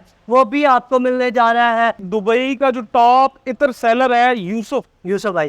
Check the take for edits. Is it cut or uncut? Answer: cut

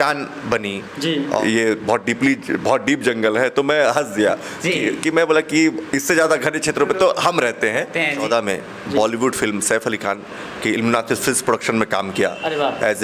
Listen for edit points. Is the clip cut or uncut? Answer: cut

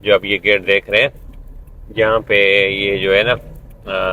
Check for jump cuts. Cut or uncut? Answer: uncut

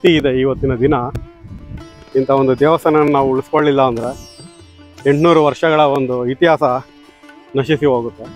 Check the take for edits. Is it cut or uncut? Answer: uncut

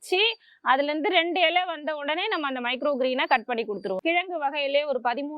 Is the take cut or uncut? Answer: cut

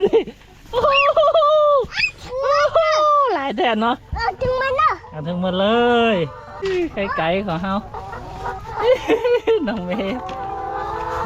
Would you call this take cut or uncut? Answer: cut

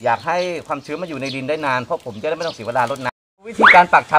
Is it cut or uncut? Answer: cut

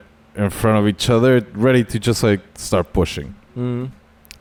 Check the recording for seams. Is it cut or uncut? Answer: uncut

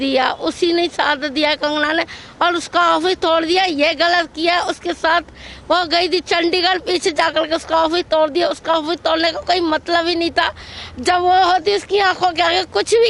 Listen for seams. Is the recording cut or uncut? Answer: uncut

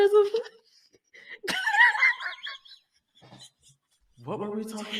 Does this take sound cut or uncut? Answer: uncut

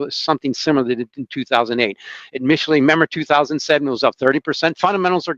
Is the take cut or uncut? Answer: uncut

